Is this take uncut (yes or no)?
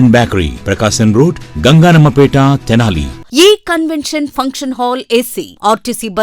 no